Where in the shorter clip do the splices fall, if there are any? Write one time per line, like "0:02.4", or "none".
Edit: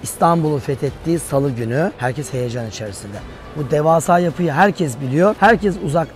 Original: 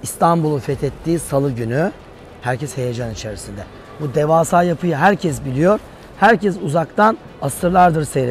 0:02.0
0:05.4